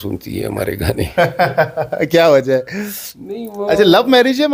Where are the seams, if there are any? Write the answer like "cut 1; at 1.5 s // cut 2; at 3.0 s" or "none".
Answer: none